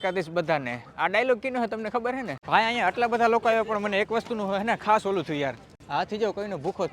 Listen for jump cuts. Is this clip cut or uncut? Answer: uncut